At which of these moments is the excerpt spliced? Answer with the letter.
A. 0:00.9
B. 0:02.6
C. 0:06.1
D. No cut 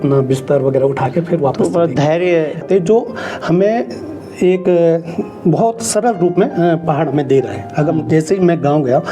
B